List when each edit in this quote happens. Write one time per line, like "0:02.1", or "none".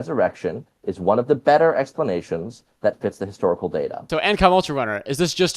0:04.0